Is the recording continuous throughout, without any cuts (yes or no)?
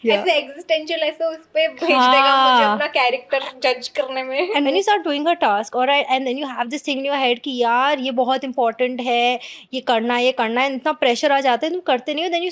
no